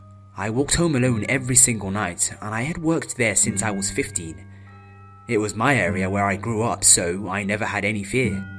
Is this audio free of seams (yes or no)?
yes